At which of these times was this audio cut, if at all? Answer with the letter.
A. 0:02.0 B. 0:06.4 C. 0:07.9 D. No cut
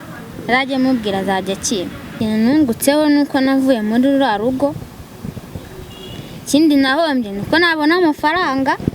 A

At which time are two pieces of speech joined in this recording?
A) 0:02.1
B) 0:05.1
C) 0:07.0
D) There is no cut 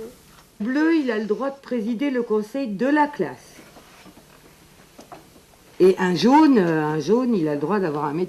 B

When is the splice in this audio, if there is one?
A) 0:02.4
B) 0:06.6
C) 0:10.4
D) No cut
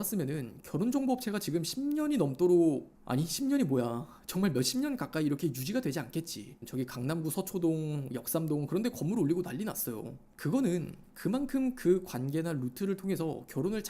B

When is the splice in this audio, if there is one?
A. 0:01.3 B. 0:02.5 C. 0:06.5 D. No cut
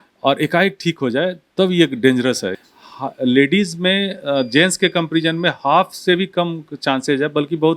B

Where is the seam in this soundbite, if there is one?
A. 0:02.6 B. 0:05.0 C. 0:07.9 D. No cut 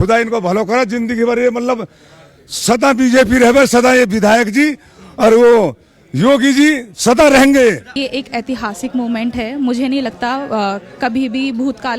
C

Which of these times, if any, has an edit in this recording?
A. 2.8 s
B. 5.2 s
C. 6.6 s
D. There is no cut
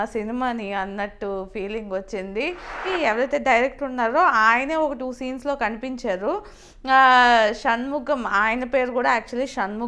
A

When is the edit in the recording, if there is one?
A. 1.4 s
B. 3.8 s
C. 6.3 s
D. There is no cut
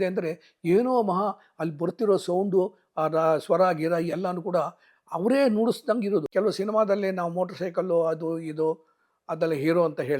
C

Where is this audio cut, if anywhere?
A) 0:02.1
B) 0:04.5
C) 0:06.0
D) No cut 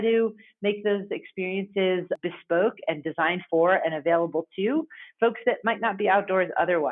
A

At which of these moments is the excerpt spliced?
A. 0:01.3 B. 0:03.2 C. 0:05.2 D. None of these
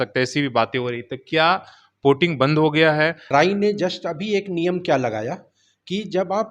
B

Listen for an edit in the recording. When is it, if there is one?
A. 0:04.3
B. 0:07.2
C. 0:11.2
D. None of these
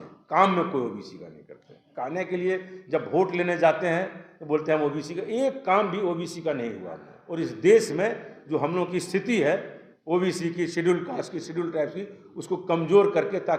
B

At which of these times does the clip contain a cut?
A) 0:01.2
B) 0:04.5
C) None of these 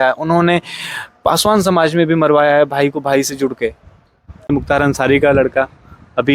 B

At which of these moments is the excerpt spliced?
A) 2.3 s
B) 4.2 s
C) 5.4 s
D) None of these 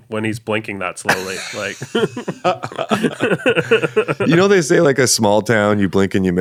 D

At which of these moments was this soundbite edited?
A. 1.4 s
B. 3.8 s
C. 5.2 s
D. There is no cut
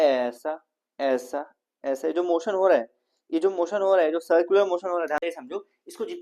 C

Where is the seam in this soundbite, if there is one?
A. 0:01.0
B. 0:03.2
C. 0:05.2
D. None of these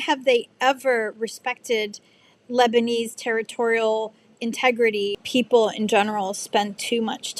C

